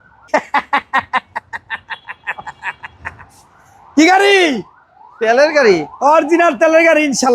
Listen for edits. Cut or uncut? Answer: uncut